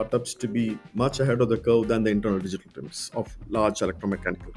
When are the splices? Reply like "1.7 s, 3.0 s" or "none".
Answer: none